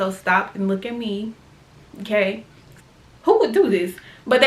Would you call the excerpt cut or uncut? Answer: cut